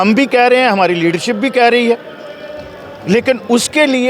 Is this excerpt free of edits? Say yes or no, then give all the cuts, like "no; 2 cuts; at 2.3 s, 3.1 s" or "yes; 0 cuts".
yes; 0 cuts